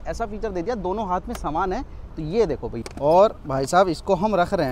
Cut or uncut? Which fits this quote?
cut